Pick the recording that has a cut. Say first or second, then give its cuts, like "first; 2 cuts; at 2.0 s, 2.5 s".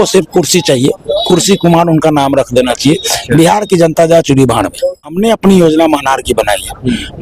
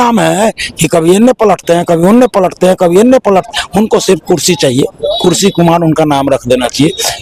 first; 1 cut; at 5.4 s